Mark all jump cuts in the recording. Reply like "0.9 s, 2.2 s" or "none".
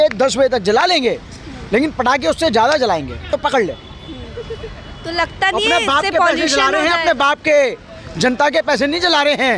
none